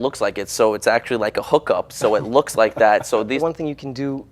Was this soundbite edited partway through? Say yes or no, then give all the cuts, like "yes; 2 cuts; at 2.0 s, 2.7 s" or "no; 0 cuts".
yes; 1 cut; at 3.4 s